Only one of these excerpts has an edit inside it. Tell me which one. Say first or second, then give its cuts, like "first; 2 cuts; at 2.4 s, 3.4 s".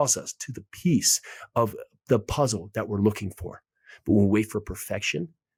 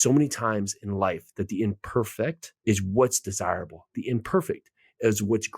second; 1 cut; at 2.5 s